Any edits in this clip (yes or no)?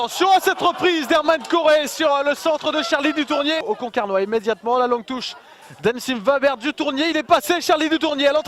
no